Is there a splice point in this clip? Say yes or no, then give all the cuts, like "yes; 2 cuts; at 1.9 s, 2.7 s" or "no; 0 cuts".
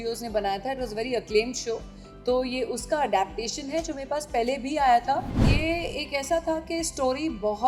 yes; 1 cut; at 5.4 s